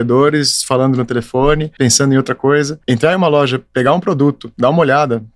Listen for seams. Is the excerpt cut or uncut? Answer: cut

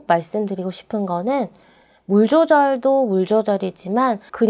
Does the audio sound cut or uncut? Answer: uncut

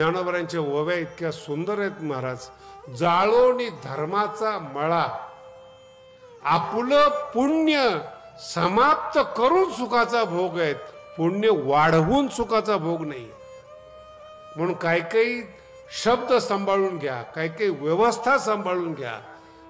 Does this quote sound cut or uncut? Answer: uncut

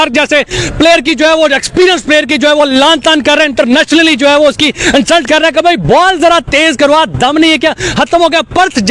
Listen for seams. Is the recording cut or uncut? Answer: uncut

